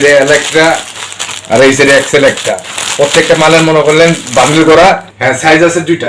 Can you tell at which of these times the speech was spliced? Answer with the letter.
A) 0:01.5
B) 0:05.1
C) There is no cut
B